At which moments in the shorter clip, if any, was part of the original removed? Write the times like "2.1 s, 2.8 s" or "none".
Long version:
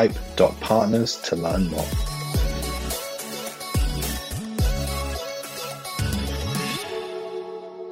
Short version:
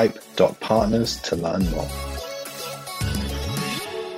1.9 s